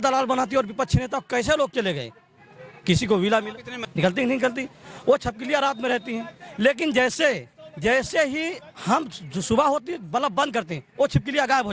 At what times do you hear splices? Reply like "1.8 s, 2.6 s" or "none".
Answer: 3.8 s